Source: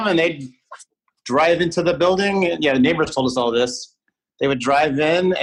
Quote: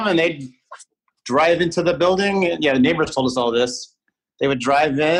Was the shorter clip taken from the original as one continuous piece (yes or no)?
yes